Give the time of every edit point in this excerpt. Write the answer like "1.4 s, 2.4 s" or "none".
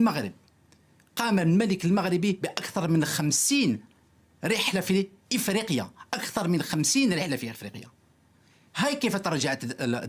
none